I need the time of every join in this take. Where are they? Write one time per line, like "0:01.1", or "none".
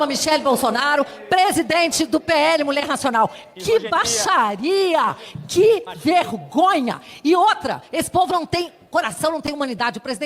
none